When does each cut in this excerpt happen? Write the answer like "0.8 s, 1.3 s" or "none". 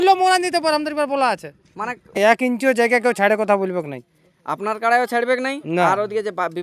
2.2 s